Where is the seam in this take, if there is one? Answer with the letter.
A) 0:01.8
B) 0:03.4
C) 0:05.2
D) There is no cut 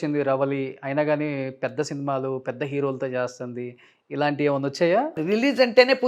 C